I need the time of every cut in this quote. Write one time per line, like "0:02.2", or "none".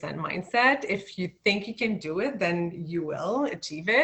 none